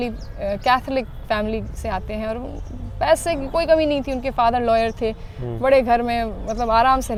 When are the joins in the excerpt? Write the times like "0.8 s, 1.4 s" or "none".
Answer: none